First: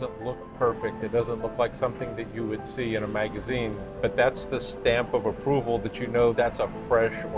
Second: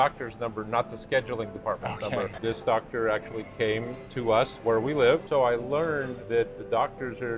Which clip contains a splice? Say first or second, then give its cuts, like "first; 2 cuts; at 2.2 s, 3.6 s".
second; 4 cuts; at 2.4 s, 4.5 s, 5.2 s, 6.2 s